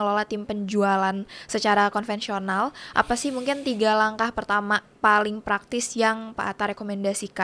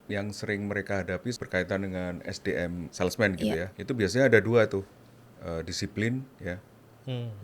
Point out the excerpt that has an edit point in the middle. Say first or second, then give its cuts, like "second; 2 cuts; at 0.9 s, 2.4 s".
second; 3 cuts; at 1.4 s, 2.9 s, 3.7 s